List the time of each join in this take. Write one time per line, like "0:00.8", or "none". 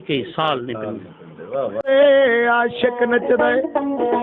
0:01.9